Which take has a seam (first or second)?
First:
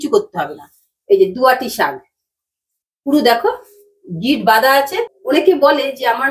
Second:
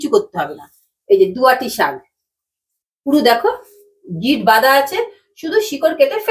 first